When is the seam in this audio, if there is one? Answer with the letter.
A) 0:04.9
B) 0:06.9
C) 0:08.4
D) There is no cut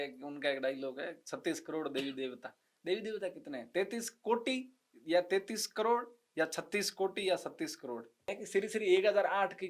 C